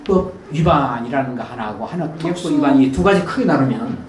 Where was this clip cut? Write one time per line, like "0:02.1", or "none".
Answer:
0:02.4